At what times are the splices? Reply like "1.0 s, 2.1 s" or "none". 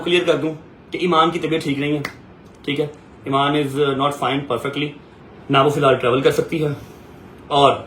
none

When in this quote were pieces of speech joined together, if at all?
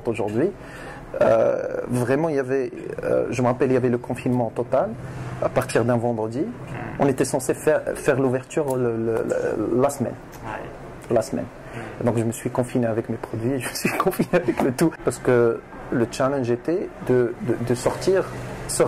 15.0 s

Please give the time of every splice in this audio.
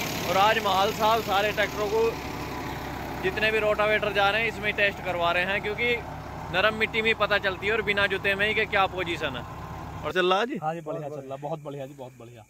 10.1 s

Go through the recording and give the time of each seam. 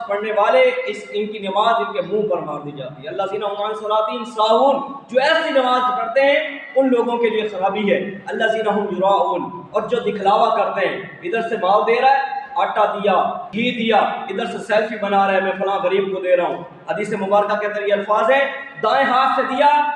13.5 s

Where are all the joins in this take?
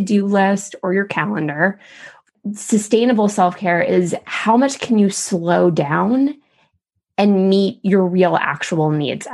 2.2 s

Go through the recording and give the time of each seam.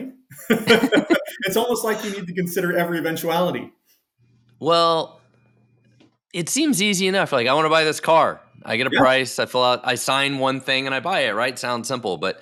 none

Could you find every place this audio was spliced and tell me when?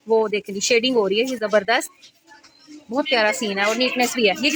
none

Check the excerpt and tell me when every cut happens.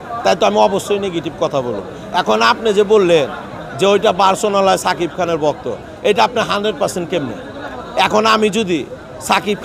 none

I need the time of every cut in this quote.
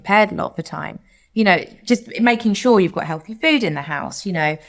none

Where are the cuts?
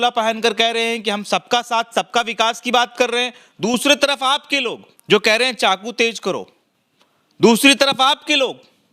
4.9 s

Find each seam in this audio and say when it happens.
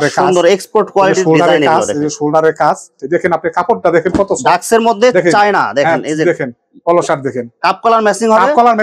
2.9 s

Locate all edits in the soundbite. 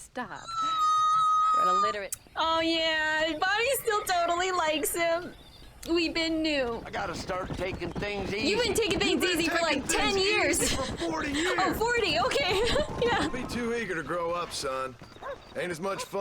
2.2 s, 6.9 s, 13.4 s

